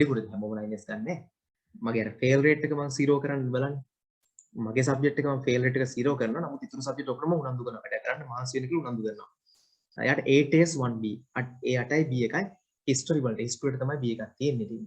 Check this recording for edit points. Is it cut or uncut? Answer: uncut